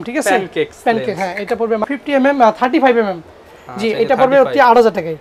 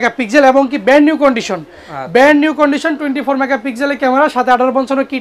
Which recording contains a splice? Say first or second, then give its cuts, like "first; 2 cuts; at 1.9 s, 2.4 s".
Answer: first; 1 cut; at 1.9 s